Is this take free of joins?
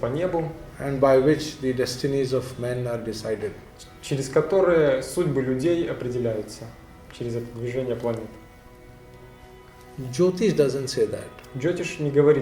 yes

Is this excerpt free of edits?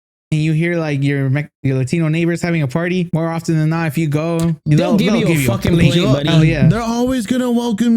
no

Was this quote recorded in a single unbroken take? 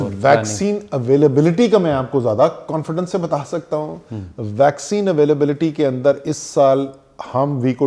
yes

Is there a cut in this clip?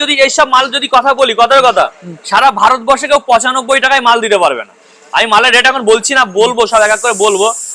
no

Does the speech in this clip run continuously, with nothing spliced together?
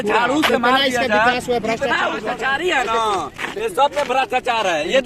no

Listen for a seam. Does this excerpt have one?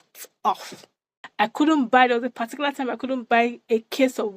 yes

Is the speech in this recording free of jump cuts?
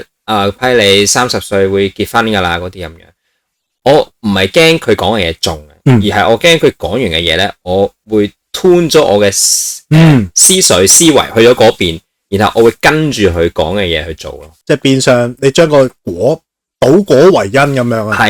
yes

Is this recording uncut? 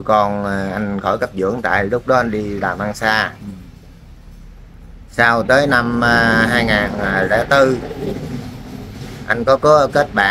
yes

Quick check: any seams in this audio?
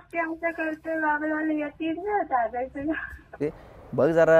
yes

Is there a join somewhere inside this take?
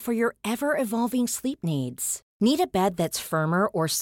no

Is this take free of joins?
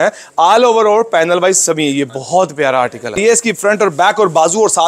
no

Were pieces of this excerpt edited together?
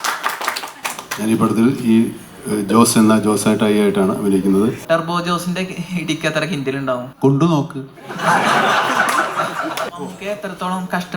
yes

